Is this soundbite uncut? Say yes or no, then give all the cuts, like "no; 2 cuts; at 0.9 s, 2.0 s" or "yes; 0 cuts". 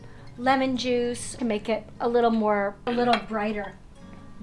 no; 2 cuts; at 1.3 s, 2.9 s